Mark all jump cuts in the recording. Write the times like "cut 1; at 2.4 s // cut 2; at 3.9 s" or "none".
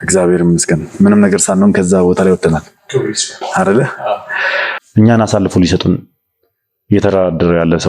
cut 1; at 4.7 s